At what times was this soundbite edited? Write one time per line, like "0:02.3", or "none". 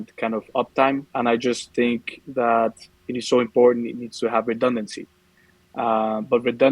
0:01.1